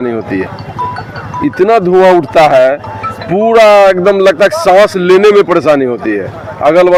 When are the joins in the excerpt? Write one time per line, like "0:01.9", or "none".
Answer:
none